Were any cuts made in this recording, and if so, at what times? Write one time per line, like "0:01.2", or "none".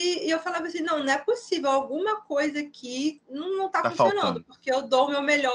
none